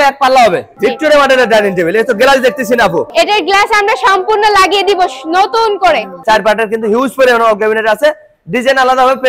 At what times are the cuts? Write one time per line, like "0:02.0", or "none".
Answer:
0:00.8
0:06.2